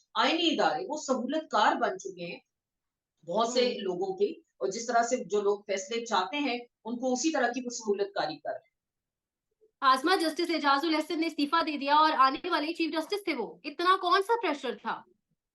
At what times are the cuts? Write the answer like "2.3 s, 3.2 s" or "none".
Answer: none